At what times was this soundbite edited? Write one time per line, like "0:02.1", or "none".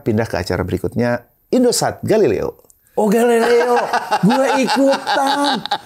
none